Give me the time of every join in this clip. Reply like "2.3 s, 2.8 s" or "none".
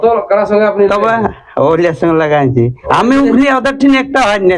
2.8 s